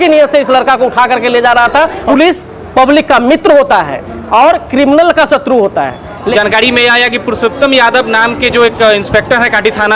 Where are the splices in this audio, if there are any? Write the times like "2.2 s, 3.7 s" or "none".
2.0 s, 6.3 s